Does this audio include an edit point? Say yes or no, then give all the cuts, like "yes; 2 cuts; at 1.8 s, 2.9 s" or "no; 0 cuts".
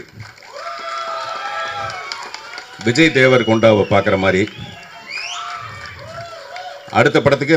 no; 0 cuts